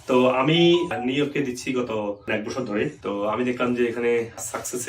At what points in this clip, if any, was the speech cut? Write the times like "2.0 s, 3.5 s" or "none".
0.9 s, 2.6 s